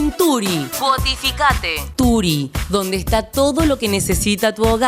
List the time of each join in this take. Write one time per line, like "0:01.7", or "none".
0:01.8